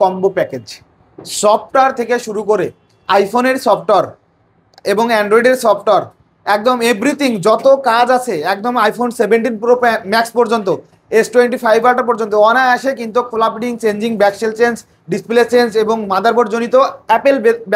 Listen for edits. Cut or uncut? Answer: uncut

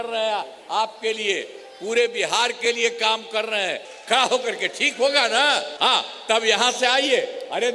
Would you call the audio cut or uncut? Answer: cut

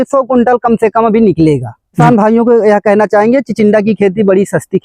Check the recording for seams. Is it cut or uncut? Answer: cut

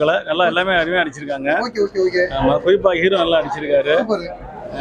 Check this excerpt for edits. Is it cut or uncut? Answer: uncut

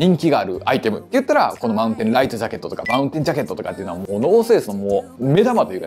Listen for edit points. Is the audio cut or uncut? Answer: uncut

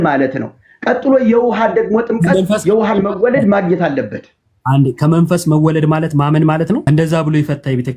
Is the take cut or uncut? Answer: cut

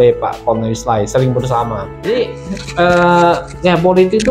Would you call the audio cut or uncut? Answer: cut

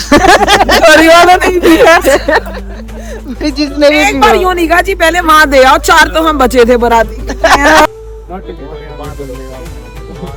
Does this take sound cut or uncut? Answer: uncut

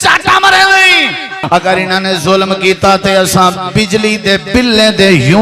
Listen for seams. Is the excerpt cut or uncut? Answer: cut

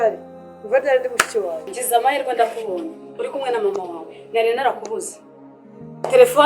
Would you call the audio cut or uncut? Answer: cut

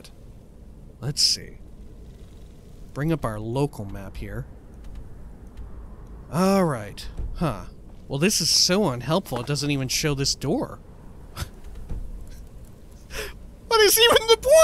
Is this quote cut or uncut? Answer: cut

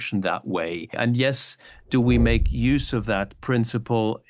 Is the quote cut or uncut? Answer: cut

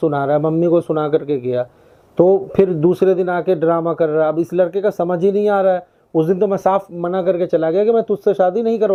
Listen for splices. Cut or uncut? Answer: uncut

